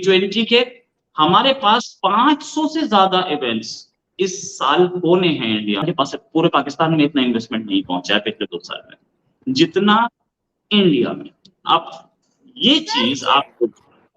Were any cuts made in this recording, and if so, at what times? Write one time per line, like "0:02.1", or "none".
0:05.8

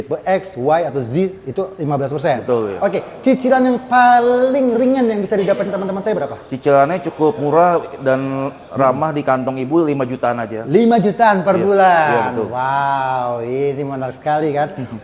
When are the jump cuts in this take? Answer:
none

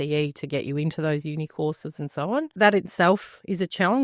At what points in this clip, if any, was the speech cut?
0:02.5

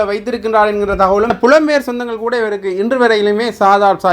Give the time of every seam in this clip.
0:01.3

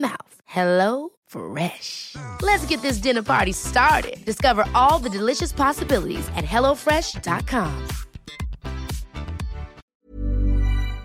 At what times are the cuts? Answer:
0:09.8

